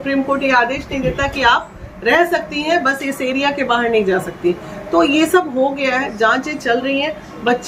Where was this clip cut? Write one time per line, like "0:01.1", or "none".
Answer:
none